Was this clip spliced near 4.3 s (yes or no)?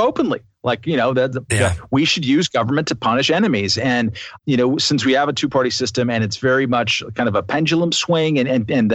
yes